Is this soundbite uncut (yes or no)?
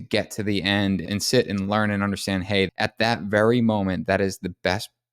no